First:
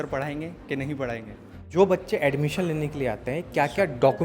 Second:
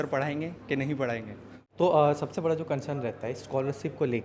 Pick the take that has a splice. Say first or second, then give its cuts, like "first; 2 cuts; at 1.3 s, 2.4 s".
first; 1 cut; at 1.7 s